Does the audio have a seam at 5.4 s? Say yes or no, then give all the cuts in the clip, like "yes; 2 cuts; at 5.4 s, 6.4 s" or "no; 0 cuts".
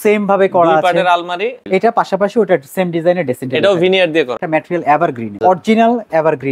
yes; 3 cuts; at 1.6 s, 4.3 s, 5.4 s